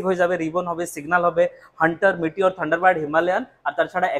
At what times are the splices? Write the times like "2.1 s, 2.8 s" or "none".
none